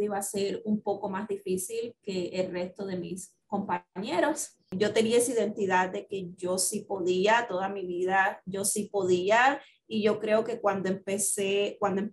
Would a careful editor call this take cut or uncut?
cut